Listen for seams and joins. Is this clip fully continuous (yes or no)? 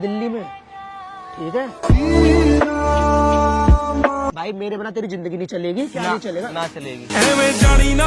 no